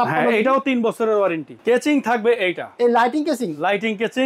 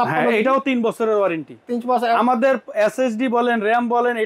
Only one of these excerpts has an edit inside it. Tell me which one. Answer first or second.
first